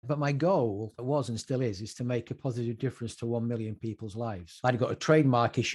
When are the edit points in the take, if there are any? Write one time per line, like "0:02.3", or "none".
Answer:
0:01.0
0:04.4

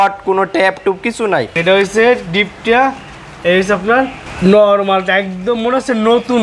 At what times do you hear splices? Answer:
0:01.6
0:04.2

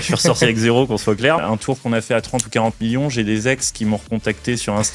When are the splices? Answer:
0:01.4

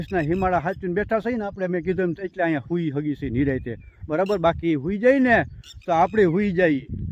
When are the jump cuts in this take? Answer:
none

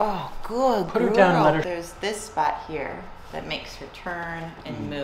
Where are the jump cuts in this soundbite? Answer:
0:01.6

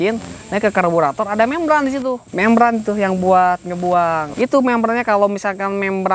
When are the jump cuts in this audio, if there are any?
0:02.3
0:04.3

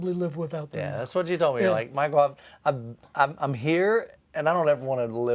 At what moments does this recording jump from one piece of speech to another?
none

